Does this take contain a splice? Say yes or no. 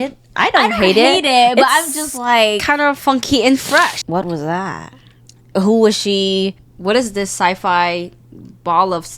yes